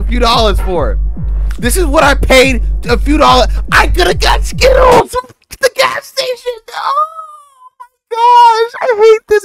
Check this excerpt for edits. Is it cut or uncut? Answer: uncut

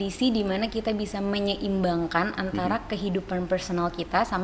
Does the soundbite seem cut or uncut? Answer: uncut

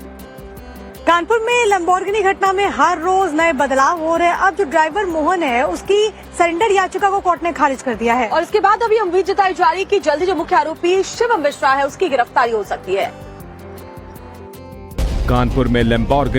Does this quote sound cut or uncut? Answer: cut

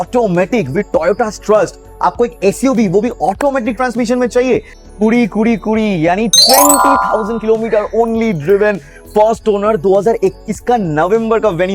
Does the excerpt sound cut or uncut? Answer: cut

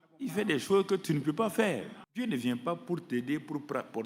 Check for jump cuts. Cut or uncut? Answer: cut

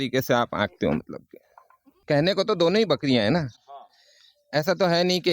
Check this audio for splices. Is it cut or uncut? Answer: cut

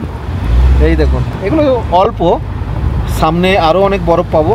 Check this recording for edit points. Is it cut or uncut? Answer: uncut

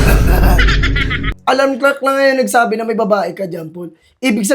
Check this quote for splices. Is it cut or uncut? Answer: cut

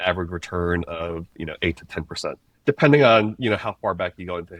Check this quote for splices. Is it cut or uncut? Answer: uncut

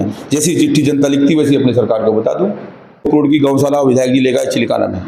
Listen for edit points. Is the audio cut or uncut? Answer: cut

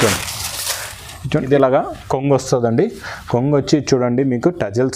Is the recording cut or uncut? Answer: cut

